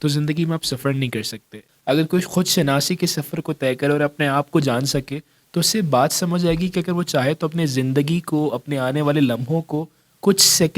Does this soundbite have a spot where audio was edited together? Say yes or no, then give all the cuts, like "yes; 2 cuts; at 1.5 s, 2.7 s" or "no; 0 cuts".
yes; 1 cut; at 1.7 s